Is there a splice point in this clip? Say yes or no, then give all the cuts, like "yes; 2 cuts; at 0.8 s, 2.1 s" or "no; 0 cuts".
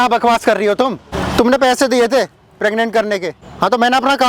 yes; 2 cuts; at 1.1 s, 3.4 s